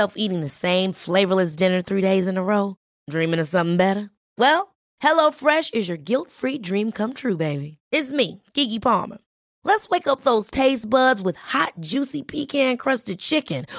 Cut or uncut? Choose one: uncut